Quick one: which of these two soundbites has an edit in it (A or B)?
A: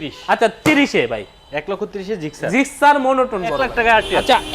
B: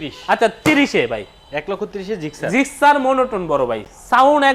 A